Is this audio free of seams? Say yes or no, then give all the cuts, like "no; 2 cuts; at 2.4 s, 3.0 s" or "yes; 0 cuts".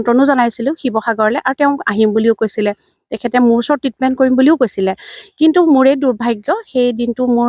yes; 0 cuts